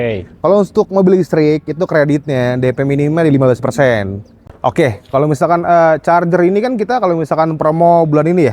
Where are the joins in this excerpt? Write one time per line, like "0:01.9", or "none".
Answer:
0:04.5